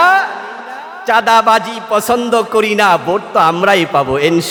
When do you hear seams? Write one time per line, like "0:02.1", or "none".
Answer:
none